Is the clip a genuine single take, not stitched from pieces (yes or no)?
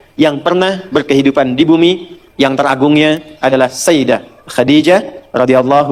yes